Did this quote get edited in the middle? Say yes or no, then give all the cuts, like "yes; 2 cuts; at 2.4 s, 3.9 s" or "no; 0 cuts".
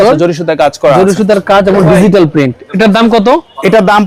no; 0 cuts